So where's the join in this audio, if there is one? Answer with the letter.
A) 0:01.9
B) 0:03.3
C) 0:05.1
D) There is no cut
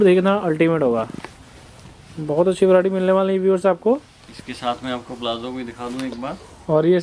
D